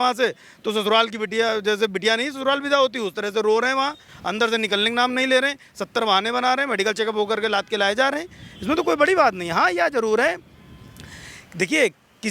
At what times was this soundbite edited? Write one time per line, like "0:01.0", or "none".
none

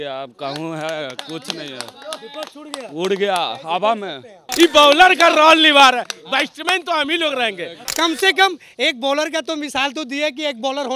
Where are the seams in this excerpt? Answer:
0:04.4
0:07.8

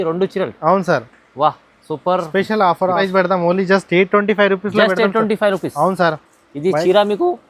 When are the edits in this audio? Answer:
0:03.0

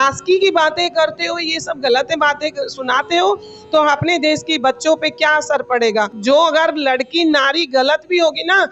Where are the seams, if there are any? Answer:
0:06.1

